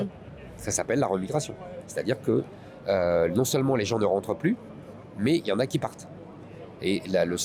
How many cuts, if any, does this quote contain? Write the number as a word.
zero